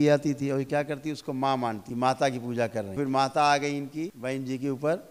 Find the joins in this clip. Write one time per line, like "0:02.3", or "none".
0:01.8
0:03.0
0:04.2